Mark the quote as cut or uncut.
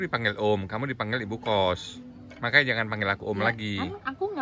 uncut